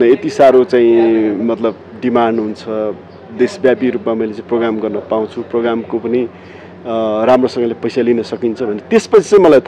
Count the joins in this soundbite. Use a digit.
0